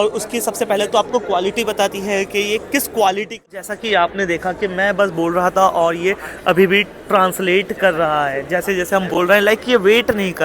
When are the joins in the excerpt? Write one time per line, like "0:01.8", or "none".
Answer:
0:03.5